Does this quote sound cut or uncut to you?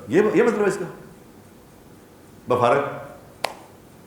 uncut